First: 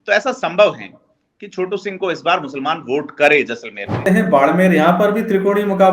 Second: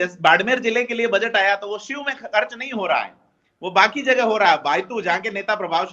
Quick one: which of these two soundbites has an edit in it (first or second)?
first